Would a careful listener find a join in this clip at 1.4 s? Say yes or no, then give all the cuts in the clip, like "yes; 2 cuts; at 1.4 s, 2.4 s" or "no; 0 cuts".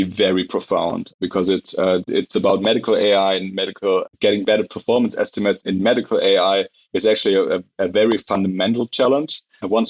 no; 0 cuts